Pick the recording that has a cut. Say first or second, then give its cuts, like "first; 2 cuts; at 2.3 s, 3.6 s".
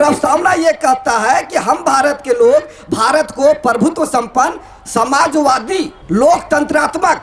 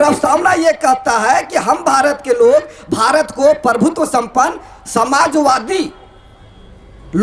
first; 1 cut; at 6.0 s